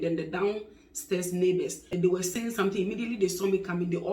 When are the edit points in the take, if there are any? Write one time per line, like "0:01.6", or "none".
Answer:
0:02.0